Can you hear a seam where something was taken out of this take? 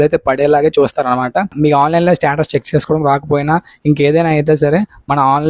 yes; 1 cut; at 1.5 s

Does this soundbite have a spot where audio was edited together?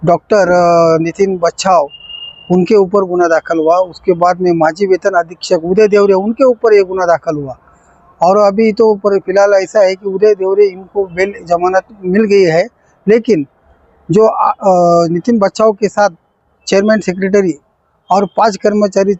no; 0 cuts

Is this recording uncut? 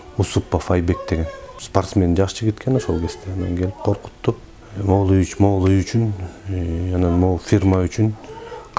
yes; 0 cuts

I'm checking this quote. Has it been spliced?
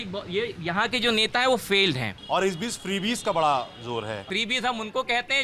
yes; 2 cuts; at 2.1 s, 4.3 s

